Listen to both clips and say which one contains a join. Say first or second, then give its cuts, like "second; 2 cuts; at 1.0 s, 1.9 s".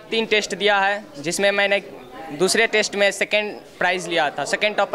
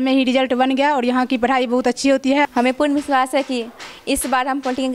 second; 1 cut; at 2.4 s